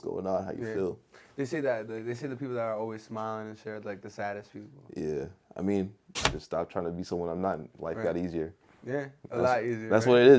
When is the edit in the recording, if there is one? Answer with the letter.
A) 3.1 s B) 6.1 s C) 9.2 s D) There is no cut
B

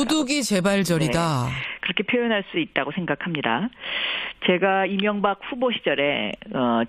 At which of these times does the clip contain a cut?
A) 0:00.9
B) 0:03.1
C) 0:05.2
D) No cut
C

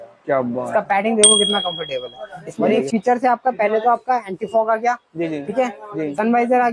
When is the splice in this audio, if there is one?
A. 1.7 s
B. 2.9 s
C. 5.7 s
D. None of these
B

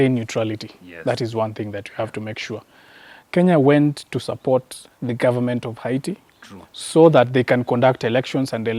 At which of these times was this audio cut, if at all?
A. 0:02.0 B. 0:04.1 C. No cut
C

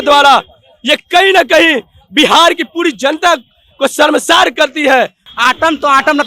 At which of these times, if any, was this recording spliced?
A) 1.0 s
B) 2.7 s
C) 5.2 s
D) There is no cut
C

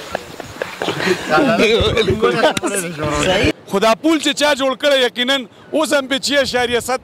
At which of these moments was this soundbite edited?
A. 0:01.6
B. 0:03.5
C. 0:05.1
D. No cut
B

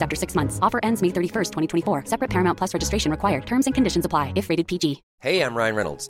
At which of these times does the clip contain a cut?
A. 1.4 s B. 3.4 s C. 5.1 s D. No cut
C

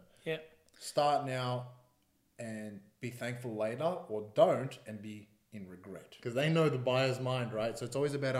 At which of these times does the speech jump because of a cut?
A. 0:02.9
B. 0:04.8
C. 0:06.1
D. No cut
C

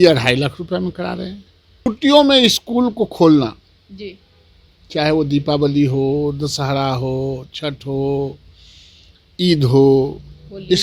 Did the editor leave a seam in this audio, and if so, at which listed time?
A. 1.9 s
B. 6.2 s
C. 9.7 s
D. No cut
A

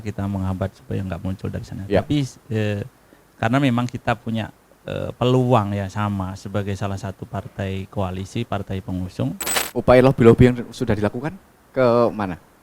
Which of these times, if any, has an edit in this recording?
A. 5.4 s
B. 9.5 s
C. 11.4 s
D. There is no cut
B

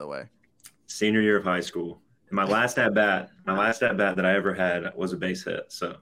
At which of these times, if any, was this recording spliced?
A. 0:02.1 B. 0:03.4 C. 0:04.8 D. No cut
D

